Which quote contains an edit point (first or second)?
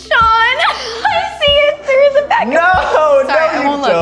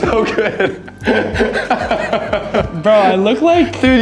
second